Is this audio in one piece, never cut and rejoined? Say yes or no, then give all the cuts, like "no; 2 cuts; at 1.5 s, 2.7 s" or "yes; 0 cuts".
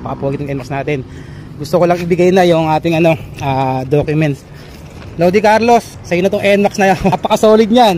no; 2 cuts; at 6.0 s, 7.1 s